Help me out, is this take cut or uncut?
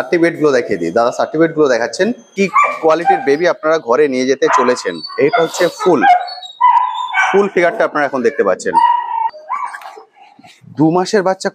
cut